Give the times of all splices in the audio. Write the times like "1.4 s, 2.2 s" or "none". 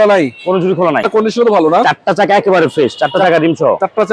1.1 s